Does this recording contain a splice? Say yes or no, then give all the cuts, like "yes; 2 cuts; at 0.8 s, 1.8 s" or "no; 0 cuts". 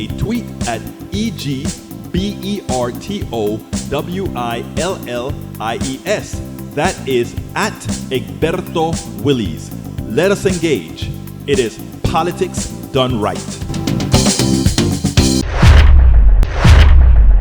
yes; 1 cut; at 16.4 s